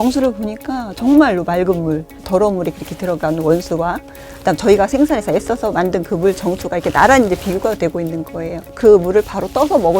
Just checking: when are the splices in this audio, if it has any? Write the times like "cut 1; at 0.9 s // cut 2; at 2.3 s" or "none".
cut 1; at 8.6 s